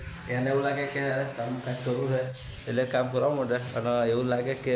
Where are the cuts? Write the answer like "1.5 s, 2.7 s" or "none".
none

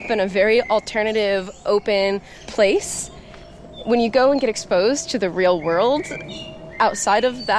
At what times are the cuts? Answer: 2.4 s

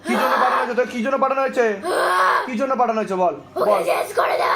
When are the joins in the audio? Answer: none

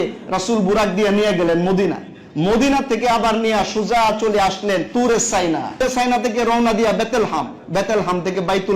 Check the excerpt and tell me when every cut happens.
4.9 s, 5.8 s

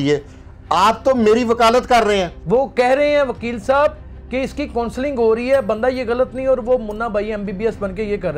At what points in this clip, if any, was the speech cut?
2.3 s

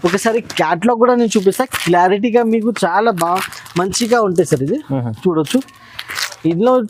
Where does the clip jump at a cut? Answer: none

